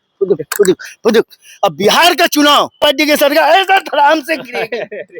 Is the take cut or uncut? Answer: cut